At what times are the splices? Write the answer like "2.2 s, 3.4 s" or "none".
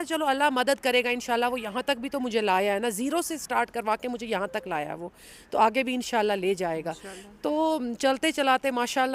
none